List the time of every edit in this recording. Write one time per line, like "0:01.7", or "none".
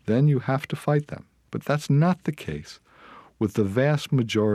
0:01.5